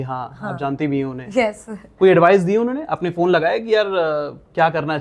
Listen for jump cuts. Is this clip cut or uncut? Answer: uncut